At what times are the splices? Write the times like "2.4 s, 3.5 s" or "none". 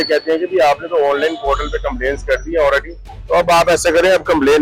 none